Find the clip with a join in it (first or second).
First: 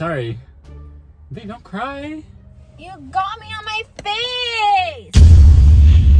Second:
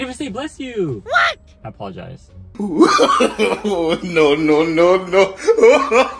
second